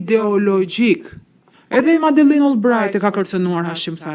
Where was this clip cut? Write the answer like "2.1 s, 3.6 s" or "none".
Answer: 1.6 s